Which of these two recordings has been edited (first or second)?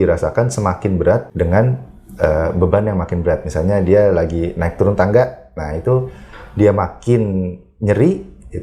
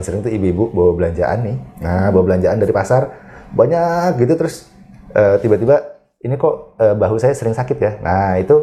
first